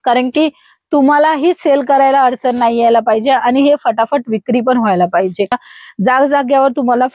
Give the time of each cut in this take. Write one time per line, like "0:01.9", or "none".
0:05.7